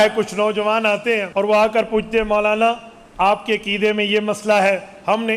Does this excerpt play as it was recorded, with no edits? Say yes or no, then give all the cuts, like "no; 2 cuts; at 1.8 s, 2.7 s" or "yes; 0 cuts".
no; 1 cut; at 1.3 s